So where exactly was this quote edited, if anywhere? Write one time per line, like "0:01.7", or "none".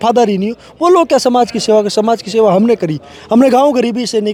none